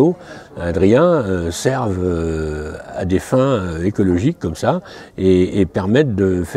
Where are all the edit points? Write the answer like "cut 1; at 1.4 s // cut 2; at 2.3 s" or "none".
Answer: none